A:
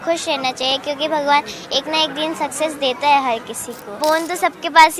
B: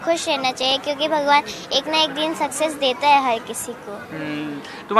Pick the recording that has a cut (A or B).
A